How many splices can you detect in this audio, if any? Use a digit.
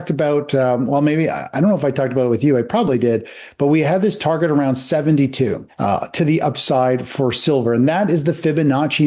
0